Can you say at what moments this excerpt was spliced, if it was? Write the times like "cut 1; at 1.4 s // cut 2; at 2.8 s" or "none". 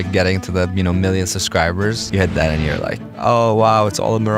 cut 1; at 2.0 s // cut 2; at 3.1 s